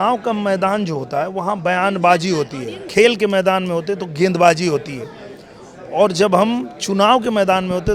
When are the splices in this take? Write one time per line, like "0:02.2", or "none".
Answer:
0:02.8